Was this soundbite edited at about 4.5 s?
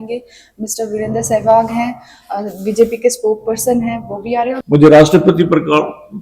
yes; 1 cut; at 4.5 s

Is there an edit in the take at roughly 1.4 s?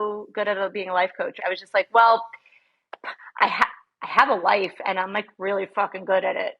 yes; 1 cut; at 1.4 s

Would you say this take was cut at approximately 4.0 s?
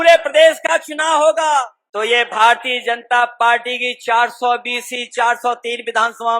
no; 1 cut; at 1.8 s

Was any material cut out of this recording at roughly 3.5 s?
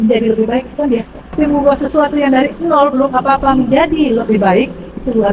no; 1 cut; at 1.2 s

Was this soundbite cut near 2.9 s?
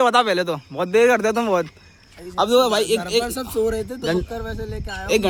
no; 0 cuts

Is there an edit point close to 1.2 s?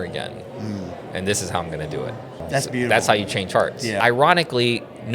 no; 2 cuts; at 2.4 s, 4.0 s

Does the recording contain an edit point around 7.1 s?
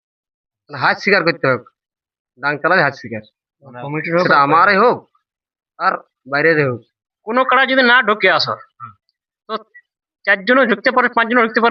yes; 1 cut; at 7.1 s

